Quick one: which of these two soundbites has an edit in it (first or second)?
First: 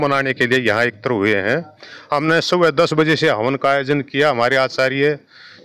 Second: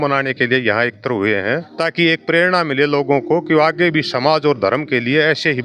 second